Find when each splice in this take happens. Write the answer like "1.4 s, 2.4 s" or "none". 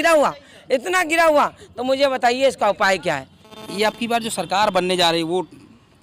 none